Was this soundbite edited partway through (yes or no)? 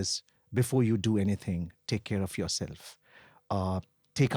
no